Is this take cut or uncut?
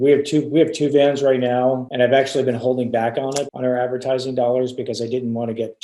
cut